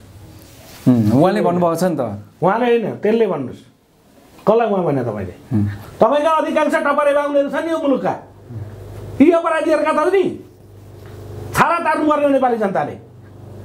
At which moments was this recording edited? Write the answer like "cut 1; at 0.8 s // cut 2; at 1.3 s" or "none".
cut 1; at 5.8 s